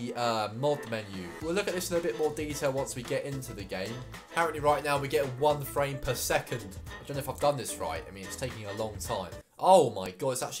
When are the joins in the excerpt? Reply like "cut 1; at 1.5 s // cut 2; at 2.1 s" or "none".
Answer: none